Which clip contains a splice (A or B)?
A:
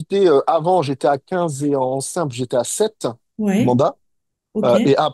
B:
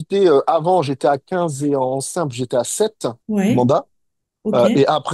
B